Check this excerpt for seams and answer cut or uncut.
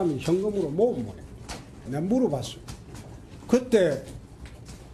cut